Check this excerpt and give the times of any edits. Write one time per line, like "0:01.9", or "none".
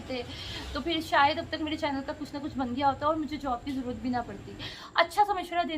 0:04.7